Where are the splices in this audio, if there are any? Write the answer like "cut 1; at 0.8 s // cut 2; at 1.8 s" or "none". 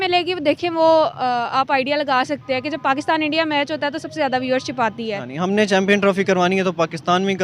cut 1; at 5.3 s